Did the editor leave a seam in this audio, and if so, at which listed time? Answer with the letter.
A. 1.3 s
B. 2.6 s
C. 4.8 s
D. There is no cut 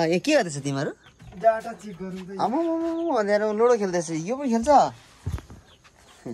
D